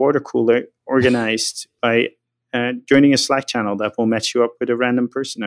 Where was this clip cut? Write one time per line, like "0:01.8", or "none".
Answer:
none